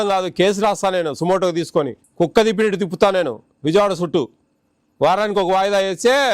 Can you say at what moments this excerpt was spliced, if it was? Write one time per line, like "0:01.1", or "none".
0:02.0